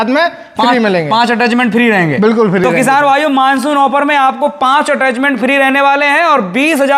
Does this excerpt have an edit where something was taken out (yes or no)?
no